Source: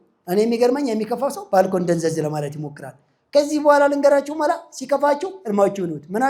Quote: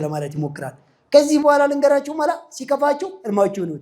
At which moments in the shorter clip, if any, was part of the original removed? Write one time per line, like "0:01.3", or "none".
none